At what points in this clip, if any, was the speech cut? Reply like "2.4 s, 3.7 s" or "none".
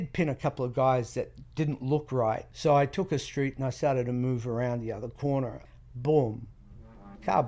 2.5 s, 5.6 s